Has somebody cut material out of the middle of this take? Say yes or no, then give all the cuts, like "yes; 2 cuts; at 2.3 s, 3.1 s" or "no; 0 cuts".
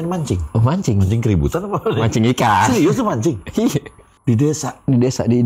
yes; 1 cut; at 4.1 s